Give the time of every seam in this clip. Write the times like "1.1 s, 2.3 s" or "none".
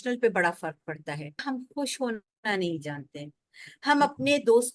1.4 s